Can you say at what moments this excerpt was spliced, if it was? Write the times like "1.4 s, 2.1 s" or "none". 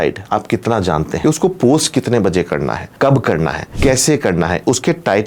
1.2 s, 2.8 s, 3.6 s